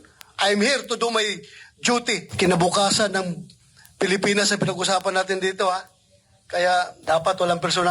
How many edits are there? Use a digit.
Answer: 2